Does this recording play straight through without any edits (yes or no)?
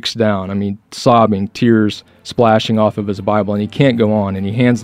yes